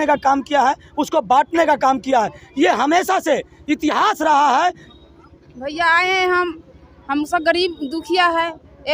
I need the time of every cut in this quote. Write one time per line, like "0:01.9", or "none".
0:04.8